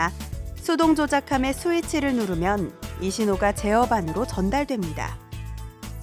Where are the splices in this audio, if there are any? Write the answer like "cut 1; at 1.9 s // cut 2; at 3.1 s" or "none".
cut 1; at 5.1 s